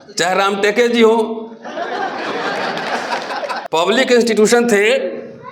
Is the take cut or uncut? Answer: cut